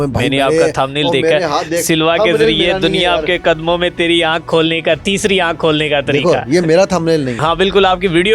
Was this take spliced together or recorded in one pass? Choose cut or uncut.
cut